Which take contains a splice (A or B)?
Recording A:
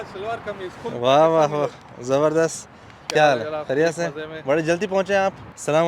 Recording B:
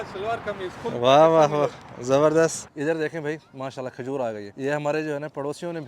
B